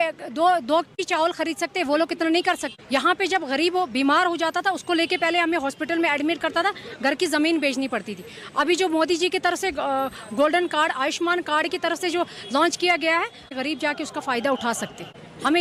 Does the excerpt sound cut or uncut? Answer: uncut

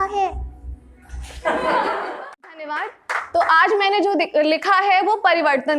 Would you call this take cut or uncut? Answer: cut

